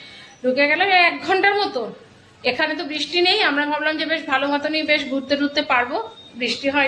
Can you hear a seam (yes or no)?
no